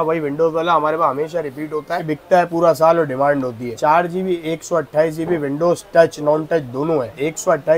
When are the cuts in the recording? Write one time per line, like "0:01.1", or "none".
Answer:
none